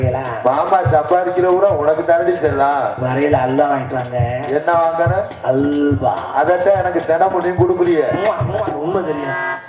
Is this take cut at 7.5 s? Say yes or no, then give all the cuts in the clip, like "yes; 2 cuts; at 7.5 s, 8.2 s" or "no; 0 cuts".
no; 1 cut; at 8.7 s